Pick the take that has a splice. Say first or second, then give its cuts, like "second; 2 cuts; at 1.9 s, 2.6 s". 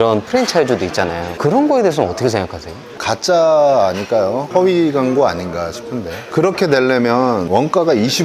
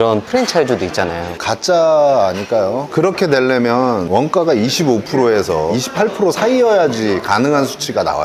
second; 3 cuts; at 1.2 s, 2.8 s, 5.7 s